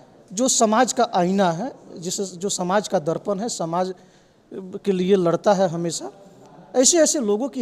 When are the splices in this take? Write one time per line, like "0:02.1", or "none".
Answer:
none